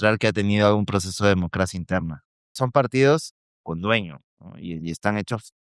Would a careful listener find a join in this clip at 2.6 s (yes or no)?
yes